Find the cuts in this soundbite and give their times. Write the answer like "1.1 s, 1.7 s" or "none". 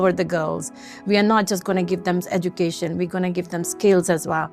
none